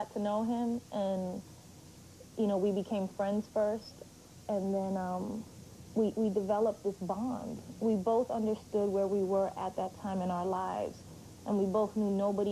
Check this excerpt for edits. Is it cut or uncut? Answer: uncut